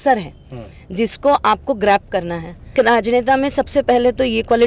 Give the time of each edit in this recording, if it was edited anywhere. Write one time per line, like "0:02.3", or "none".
0:02.7